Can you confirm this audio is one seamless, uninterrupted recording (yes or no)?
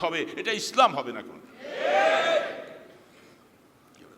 yes